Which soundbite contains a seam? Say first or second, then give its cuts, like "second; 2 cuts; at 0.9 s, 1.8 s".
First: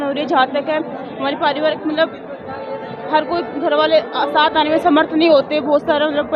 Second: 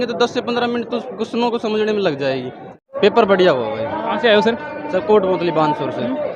second; 1 cut; at 2.9 s